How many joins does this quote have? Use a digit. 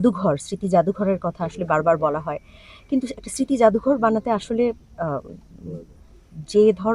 0